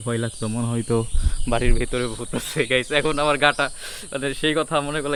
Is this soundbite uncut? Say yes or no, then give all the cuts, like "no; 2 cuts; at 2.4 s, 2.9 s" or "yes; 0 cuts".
yes; 0 cuts